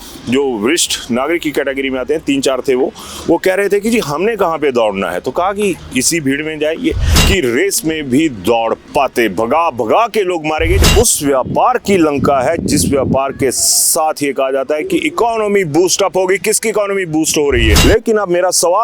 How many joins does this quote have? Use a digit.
3